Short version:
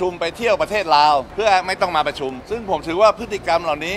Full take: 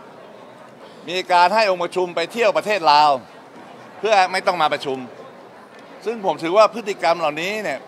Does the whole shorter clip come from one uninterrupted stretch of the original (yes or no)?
no